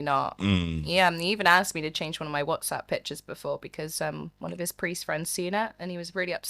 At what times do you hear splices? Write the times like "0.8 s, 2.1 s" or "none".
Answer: none